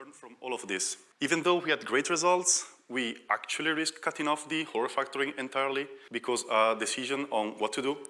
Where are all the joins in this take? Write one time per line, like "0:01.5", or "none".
0:01.0
0:06.0